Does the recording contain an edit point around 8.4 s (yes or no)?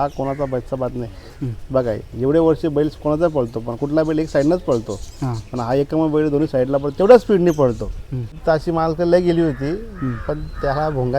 yes